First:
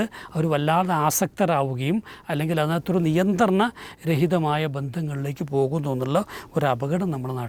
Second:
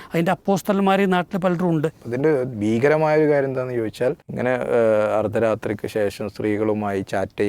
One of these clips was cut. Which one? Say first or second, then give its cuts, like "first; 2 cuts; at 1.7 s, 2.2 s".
second; 2 cuts; at 2.0 s, 4.3 s